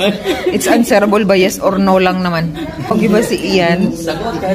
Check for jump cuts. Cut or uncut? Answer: cut